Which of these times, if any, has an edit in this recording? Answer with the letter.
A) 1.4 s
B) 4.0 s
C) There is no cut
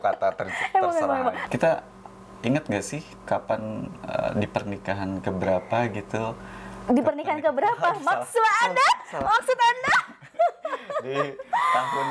A